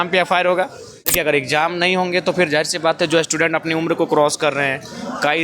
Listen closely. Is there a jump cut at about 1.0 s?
yes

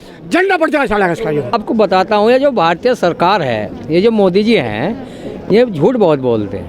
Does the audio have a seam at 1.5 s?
no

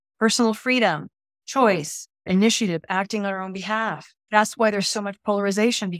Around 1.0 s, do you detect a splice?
no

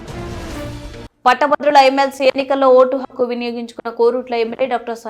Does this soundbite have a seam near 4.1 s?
no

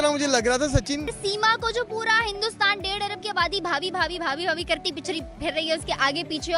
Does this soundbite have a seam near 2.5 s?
no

